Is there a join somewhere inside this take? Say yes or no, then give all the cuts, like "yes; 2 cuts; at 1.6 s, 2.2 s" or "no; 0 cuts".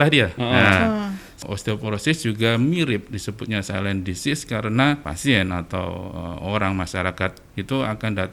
yes; 2 cuts; at 1.4 s, 5.1 s